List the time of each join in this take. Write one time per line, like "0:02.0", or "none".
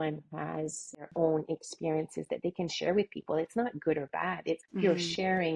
0:01.0
0:04.7